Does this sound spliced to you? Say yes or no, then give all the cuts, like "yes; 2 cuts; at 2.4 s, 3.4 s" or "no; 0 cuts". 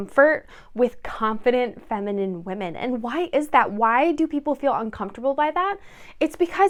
no; 0 cuts